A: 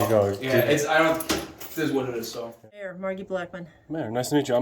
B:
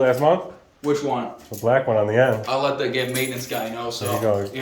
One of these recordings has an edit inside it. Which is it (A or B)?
A